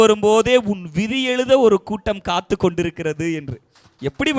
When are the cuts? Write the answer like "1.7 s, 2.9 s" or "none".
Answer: none